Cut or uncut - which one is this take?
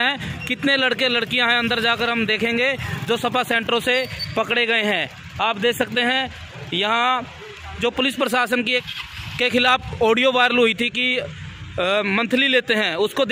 cut